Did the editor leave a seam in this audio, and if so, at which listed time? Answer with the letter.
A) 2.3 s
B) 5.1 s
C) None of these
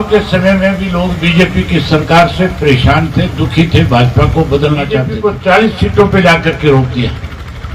B